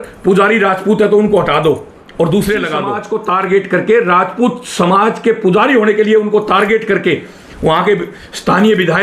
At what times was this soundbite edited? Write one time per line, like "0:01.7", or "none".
0:03.0

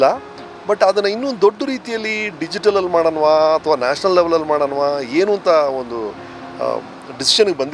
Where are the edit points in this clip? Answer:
none

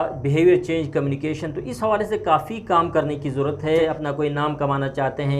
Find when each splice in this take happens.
0:03.8

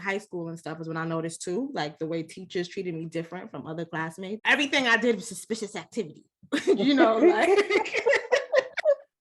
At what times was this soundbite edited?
0:04.4

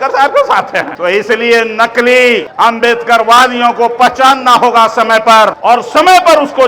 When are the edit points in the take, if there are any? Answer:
0:00.9
0:02.5
0:05.6

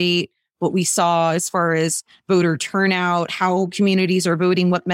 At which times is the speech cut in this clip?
none

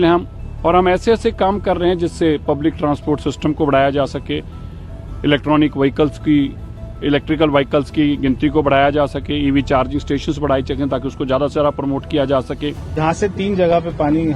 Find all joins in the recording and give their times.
0:12.9

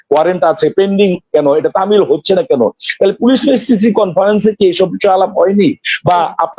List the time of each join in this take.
none

